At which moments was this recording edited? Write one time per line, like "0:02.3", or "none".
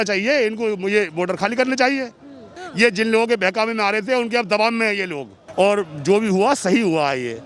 0:02.6
0:05.4